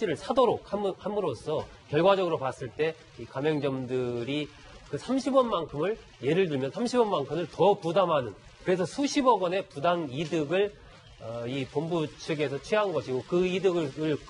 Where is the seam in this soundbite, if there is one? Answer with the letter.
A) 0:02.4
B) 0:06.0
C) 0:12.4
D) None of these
D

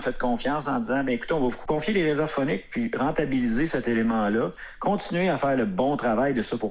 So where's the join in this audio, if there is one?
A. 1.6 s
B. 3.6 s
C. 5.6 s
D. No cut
A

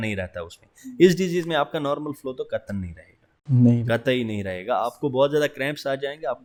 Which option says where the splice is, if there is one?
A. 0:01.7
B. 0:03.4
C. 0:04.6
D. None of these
D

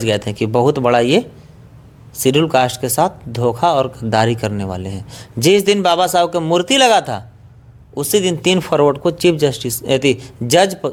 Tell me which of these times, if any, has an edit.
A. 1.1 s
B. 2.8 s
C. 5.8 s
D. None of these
D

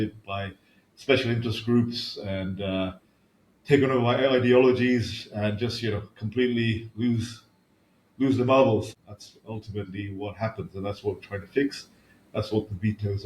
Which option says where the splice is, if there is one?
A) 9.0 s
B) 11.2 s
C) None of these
A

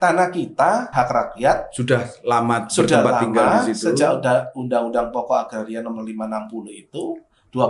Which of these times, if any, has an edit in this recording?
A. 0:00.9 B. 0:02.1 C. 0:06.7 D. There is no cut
A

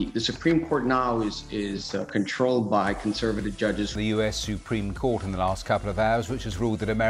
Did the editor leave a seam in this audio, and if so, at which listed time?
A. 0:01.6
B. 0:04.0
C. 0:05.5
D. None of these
D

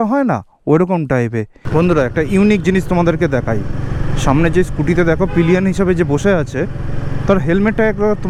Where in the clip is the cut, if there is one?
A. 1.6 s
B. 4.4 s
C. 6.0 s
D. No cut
A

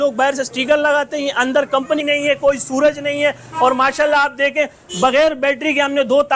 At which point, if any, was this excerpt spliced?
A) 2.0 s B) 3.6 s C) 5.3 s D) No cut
A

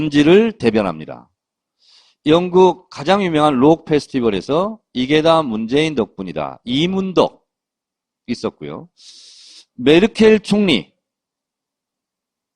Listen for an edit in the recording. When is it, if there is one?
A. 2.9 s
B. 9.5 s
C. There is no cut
A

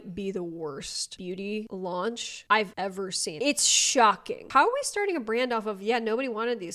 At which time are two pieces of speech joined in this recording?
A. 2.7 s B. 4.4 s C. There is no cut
B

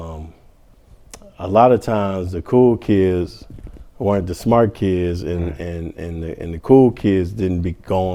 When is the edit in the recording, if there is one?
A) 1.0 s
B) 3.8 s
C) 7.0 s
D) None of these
D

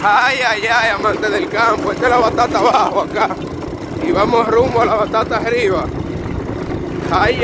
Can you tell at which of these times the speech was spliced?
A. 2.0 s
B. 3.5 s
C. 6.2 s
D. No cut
D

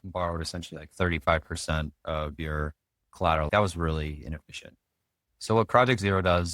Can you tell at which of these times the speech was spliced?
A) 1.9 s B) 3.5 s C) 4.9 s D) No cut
B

